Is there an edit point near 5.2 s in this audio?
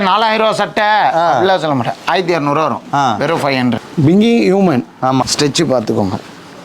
yes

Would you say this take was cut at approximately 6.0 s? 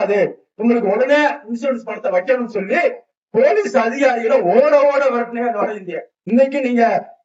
no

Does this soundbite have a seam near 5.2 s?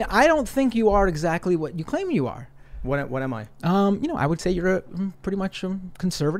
no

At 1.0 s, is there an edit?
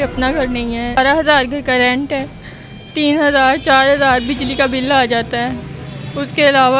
yes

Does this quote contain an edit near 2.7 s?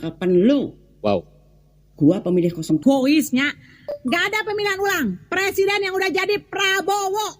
yes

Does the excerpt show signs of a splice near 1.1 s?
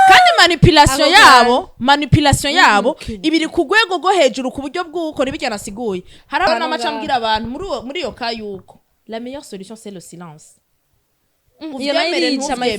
no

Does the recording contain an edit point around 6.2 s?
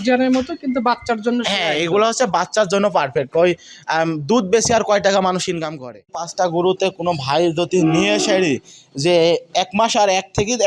yes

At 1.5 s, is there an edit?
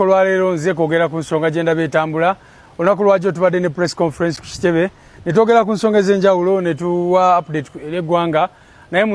no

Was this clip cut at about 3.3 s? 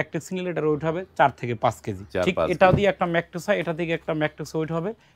no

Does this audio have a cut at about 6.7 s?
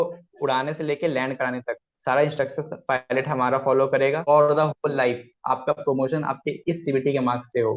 no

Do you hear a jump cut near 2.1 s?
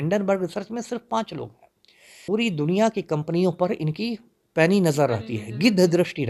yes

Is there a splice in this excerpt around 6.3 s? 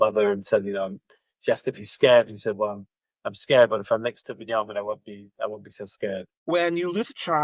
yes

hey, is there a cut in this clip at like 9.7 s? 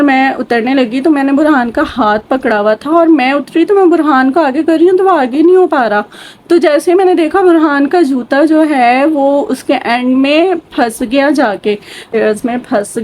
no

